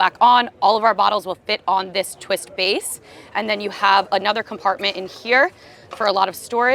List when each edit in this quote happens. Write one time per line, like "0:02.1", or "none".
none